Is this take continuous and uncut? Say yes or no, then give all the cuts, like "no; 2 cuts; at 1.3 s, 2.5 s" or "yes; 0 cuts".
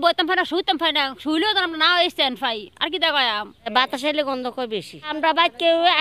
no; 2 cuts; at 3.7 s, 5.1 s